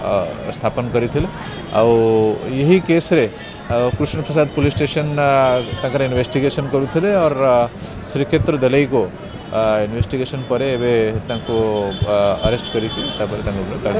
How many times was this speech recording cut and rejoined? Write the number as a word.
one